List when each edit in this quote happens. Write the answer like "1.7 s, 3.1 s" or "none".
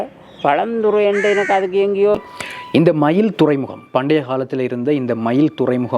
2.2 s